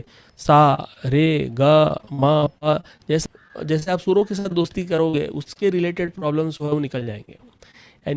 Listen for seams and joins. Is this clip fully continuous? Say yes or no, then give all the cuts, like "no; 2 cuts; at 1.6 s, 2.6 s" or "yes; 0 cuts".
no; 1 cut; at 3.2 s